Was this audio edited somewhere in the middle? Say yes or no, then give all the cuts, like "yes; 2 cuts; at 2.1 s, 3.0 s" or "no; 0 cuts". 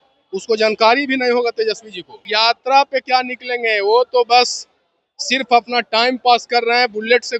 yes; 1 cut; at 2.3 s